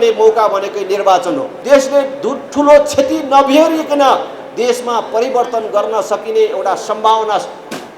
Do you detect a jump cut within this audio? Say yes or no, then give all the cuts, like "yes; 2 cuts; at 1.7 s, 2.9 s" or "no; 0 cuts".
yes; 1 cut; at 1.5 s